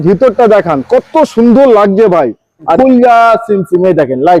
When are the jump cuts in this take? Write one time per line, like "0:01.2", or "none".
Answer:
0:02.8